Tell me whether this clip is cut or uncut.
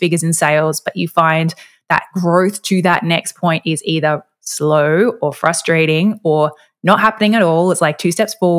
uncut